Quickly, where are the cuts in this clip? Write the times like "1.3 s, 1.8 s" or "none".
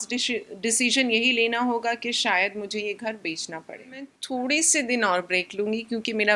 4.2 s